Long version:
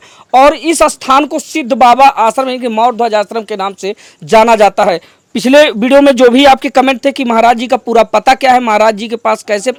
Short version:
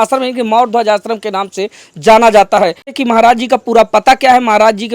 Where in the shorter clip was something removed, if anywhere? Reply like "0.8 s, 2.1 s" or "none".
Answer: 2.9 s